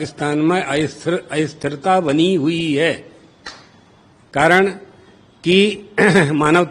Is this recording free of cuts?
yes; 0 cuts

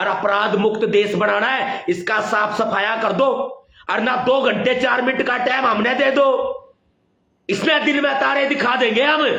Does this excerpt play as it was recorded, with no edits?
yes; 0 cuts

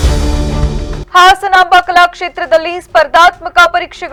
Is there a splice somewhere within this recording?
no; 0 cuts

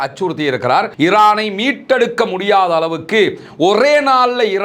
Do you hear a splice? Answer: yes; 1 cut; at 0.9 s

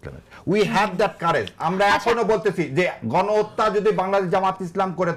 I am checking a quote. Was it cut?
no; 0 cuts

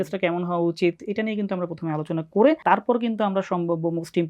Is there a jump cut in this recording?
yes; 1 cut; at 2.6 s

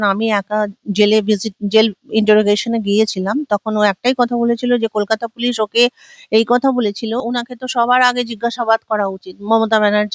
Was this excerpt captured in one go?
no; 1 cut; at 7.2 s

